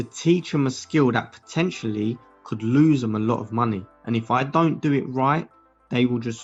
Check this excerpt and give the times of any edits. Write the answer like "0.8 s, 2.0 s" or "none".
none